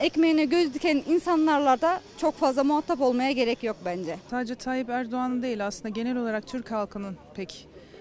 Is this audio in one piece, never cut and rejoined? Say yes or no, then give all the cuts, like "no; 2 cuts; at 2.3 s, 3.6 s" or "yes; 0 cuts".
no; 1 cut; at 4.2 s